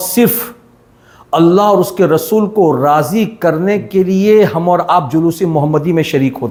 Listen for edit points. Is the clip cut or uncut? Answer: uncut